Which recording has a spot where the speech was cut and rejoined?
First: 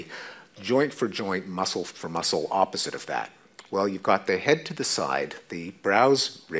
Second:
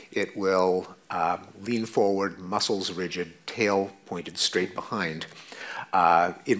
second; 1 cut; at 1.5 s

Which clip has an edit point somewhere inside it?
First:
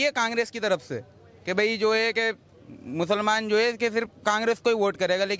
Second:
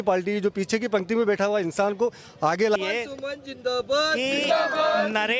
second; 1 cut; at 2.8 s

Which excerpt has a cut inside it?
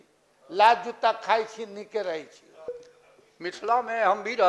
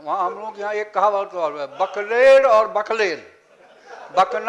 first; 1 cut; at 2.8 s

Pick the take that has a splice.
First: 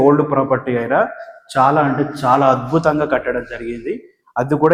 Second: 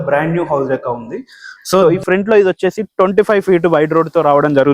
second; 1 cut; at 1.8 s

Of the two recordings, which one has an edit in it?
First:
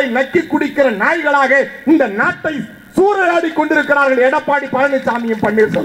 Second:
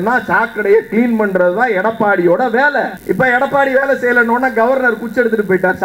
second; 1 cut; at 3.0 s

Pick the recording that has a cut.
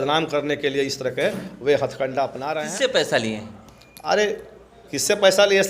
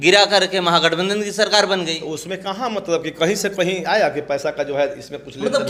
first; 1 cut; at 2.5 s

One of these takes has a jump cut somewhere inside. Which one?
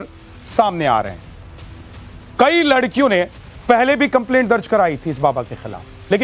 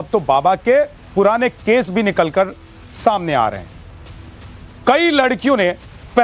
first; 1 cut; at 4.8 s

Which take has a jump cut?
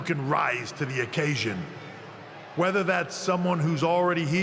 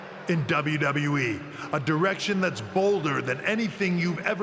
first; 1 cut; at 3.4 s

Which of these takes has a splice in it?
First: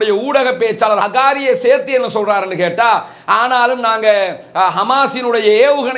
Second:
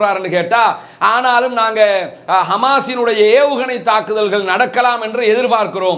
first; 1 cut; at 1.0 s

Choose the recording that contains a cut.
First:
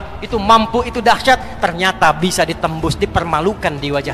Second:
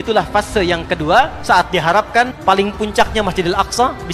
second; 2 cuts; at 1.4 s, 2.3 s

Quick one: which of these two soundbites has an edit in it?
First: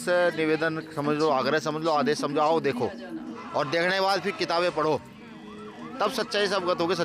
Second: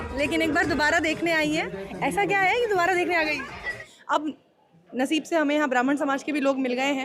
second; 1 cut; at 3.8 s

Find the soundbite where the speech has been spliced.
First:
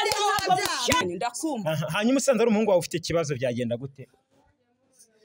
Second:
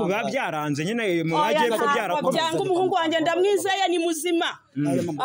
first; 1 cut; at 1.0 s

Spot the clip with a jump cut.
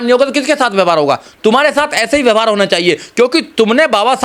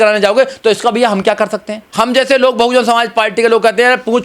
second; 1 cut; at 1.8 s

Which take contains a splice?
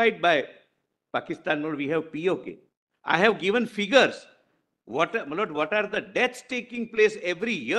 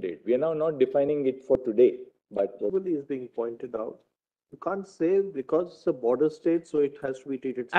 second; 1 cut; at 2.7 s

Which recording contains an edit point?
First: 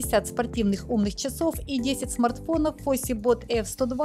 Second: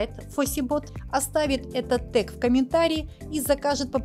second; 1 cut; at 1.0 s

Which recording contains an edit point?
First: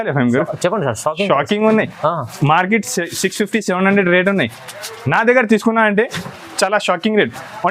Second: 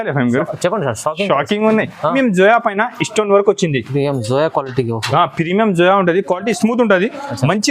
second; 1 cut; at 2.1 s

